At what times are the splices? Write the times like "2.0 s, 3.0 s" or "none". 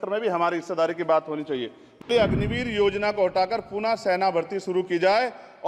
2.0 s

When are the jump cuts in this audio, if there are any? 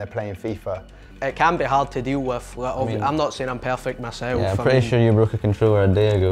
1.2 s

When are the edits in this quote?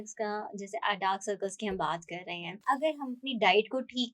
2.5 s

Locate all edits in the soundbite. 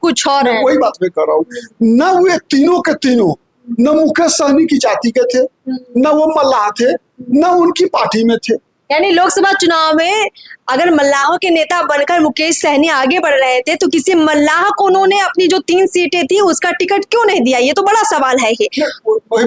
none

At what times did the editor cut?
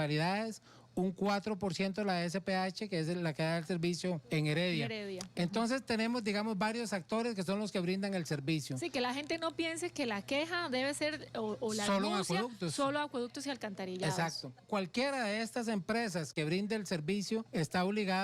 4.2 s, 14.6 s, 17.5 s

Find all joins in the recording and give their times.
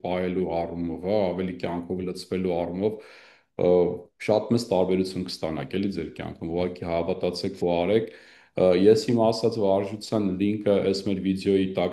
none

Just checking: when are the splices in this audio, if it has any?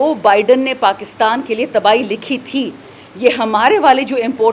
none

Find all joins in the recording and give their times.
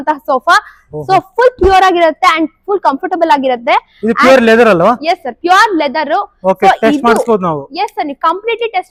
none

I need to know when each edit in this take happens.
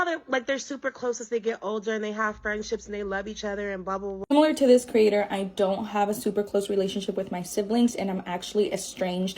4.2 s

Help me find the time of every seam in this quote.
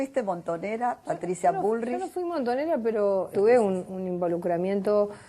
3.3 s

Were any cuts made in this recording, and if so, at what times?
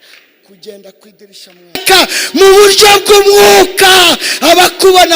1.8 s

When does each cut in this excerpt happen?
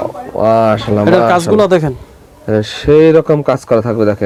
none

